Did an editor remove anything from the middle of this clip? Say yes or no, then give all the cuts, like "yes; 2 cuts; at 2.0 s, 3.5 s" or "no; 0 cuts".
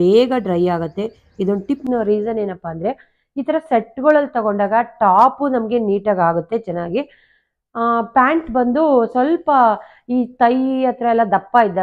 yes; 1 cut; at 1.9 s